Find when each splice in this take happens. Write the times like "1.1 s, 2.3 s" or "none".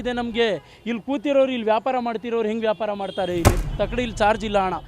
3.7 s